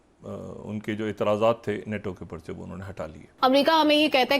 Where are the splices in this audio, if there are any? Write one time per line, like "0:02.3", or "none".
0:03.3